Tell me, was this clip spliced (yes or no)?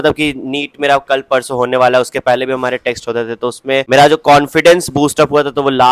yes